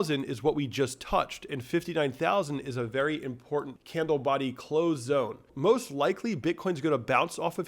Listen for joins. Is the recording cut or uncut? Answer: cut